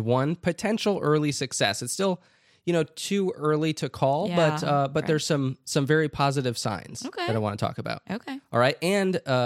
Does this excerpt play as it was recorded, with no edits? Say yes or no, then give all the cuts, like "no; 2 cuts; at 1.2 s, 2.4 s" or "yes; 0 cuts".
yes; 0 cuts